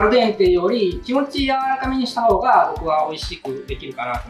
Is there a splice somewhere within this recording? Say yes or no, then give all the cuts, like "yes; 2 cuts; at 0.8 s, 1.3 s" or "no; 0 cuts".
no; 0 cuts